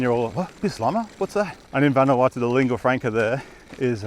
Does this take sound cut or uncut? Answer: cut